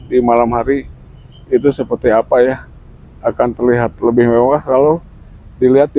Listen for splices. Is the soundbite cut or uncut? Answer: uncut